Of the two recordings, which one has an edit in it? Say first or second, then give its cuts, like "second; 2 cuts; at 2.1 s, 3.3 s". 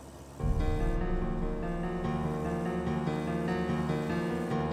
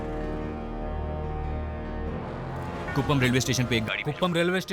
second; 1 cut; at 2.8 s